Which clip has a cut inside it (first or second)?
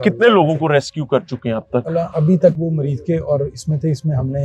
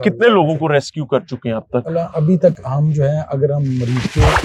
first